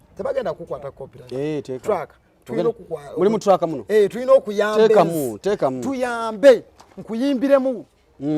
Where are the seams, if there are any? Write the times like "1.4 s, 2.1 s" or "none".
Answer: none

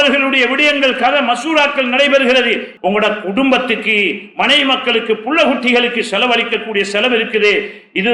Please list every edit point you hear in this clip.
2.7 s

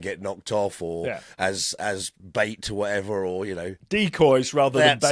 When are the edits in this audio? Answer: 2.2 s, 4.2 s

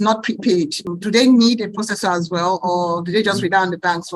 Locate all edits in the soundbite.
none

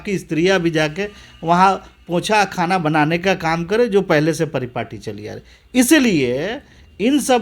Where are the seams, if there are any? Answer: none

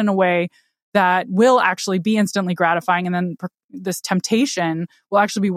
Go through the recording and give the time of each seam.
none

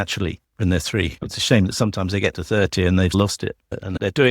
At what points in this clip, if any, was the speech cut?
1.3 s

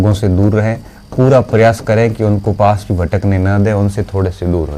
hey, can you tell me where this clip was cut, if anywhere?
none

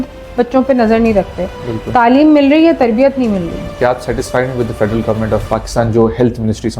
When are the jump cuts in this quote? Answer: 3.7 s, 5.4 s

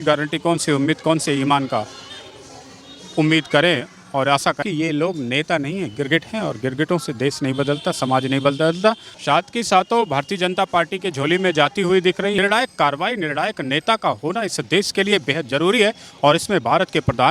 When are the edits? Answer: 4.2 s, 9.1 s, 12.4 s

